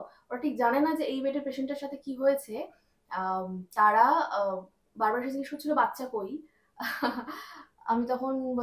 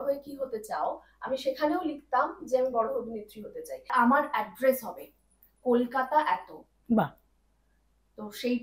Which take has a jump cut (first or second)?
second